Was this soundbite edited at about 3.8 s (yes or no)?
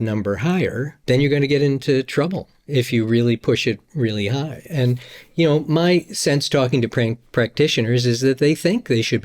no